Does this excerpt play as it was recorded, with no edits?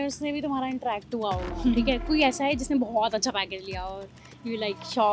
yes; 0 cuts

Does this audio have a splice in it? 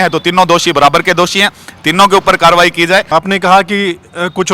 yes; 1 cut; at 3.1 s

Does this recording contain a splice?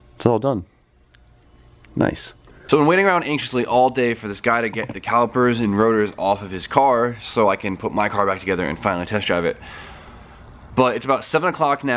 no; 0 cuts

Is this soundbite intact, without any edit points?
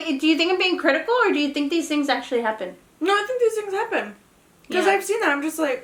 yes; 0 cuts

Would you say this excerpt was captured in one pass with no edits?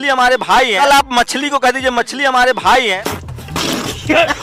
yes; 0 cuts

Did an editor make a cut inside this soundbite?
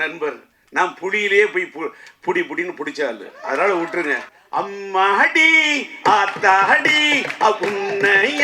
yes; 1 cut; at 4.3 s

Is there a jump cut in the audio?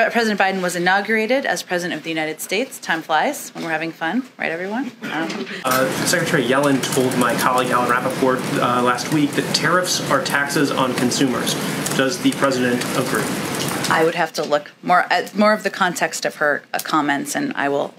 yes; 1 cut; at 5.7 s

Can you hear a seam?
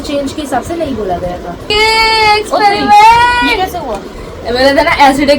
yes; 1 cut; at 1.7 s

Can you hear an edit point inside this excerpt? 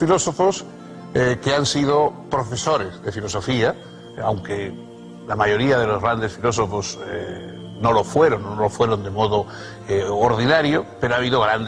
yes; 1 cut; at 7.8 s

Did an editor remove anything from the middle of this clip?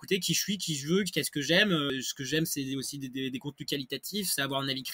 yes; 1 cut; at 1.9 s

